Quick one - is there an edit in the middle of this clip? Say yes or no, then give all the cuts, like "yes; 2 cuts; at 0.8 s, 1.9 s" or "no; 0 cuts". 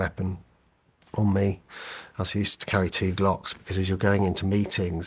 no; 0 cuts